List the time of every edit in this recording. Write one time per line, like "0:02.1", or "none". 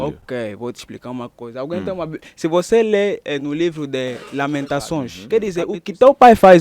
0:05.2